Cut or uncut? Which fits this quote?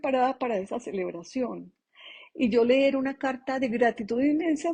uncut